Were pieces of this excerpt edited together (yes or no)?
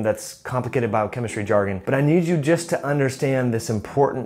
yes